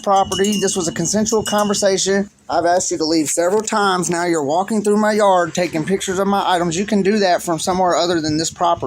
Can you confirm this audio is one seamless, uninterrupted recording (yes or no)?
no